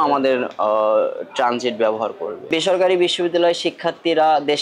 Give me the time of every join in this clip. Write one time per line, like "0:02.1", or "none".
0:02.5